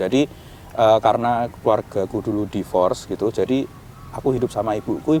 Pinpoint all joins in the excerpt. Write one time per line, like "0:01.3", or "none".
none